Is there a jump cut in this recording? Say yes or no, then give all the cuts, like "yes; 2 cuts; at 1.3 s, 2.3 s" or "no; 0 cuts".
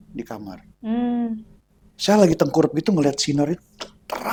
no; 0 cuts